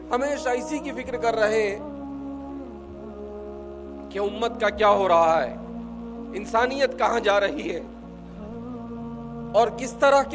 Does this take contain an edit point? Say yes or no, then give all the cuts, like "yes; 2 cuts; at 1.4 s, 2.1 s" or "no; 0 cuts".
yes; 2 cuts; at 7.8 s, 9.2 s